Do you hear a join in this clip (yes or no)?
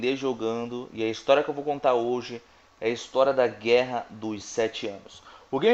no